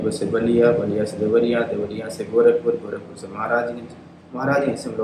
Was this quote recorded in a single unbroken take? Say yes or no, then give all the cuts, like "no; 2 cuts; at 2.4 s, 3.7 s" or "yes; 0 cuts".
yes; 0 cuts